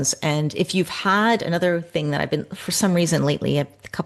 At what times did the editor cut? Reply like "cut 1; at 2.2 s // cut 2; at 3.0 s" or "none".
none